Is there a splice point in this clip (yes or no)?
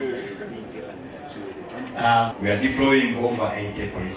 yes